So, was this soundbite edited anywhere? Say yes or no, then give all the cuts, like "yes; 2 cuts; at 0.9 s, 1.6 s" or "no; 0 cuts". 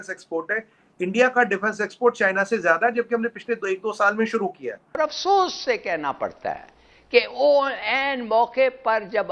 yes; 1 cut; at 5.0 s